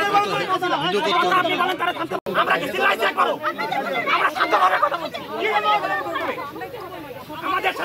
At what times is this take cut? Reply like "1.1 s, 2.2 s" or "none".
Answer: 2.2 s